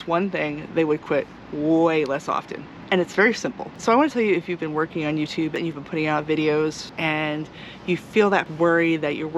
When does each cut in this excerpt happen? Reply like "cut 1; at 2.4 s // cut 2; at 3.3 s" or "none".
cut 1; at 3.7 s // cut 2; at 5.5 s // cut 3; at 6.9 s // cut 4; at 8.5 s